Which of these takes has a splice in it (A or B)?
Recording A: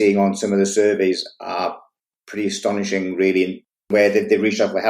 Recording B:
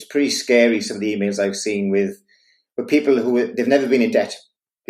A